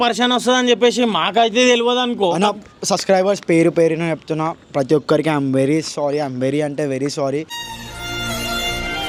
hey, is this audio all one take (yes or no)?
yes